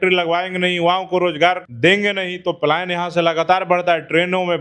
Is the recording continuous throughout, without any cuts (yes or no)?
no